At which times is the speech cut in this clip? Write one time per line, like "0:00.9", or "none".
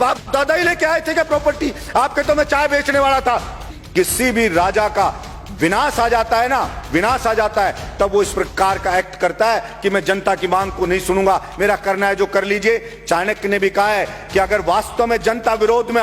0:03.7